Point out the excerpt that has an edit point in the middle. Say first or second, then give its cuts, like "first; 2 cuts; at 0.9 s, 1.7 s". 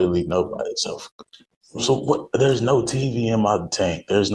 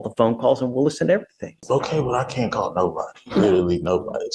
second; 1 cut; at 1.6 s